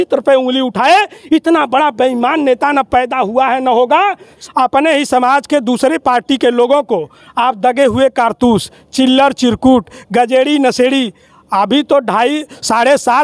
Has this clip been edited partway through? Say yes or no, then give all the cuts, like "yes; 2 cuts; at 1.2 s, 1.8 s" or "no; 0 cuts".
yes; 1 cut; at 4.4 s